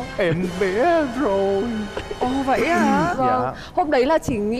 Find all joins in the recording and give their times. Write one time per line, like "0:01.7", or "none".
none